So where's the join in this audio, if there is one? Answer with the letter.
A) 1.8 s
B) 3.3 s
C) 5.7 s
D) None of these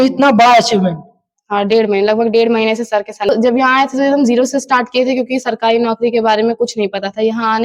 B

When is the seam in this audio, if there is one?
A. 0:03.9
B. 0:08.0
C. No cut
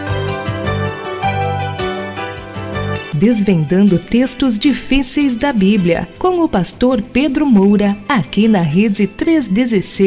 B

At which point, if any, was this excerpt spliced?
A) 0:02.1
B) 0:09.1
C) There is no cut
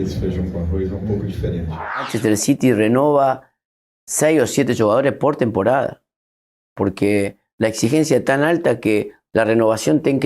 A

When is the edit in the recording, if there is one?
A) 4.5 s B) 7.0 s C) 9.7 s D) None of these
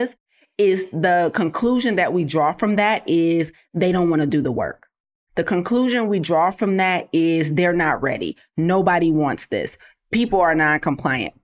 D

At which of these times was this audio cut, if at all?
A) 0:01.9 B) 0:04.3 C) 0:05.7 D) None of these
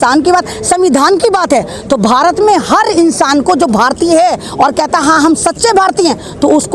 D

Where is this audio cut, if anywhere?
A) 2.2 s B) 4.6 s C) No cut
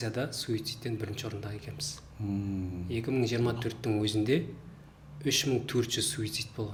C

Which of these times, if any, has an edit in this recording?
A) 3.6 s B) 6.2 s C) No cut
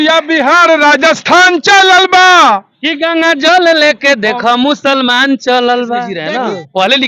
B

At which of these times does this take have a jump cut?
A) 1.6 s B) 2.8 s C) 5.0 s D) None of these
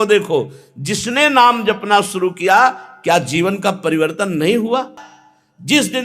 C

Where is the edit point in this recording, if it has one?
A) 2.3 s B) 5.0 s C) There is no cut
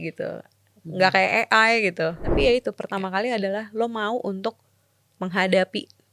A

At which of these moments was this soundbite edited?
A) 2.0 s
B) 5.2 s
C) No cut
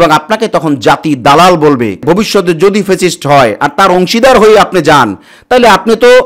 A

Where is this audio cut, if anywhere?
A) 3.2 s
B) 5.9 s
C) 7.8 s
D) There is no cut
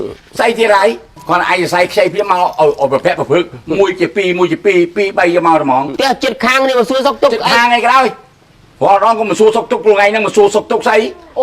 B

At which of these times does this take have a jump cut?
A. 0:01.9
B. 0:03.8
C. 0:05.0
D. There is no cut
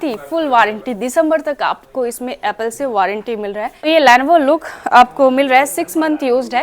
B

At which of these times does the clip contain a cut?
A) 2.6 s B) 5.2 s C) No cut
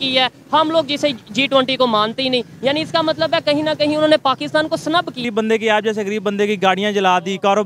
B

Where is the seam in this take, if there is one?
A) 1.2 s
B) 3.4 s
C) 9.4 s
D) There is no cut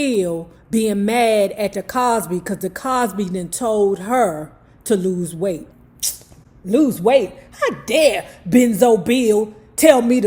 D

